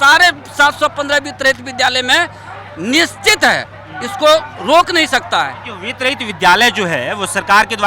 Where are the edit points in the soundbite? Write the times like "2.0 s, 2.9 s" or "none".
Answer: none